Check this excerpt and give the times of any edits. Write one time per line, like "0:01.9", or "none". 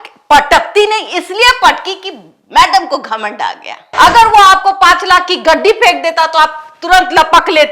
0:03.9